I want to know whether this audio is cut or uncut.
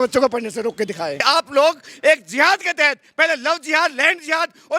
cut